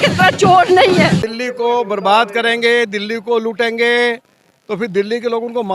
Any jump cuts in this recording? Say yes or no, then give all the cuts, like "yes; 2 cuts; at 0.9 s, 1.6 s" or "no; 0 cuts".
yes; 1 cut; at 1.2 s